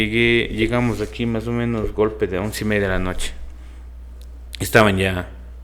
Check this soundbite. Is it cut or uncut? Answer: uncut